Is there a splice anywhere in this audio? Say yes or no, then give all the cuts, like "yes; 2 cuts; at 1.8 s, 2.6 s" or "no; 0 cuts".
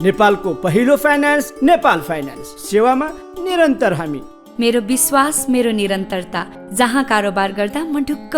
no; 0 cuts